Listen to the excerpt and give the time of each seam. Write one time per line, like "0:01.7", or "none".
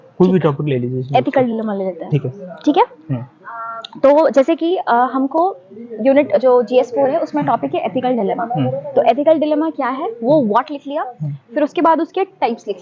none